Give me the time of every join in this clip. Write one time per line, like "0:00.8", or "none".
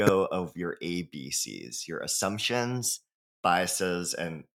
none